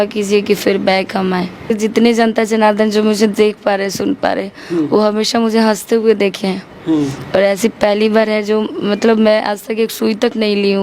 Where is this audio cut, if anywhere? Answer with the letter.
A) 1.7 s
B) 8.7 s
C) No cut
A